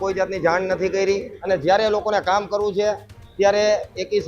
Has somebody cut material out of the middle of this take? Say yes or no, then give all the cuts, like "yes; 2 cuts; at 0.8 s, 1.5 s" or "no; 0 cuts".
yes; 1 cut; at 1.3 s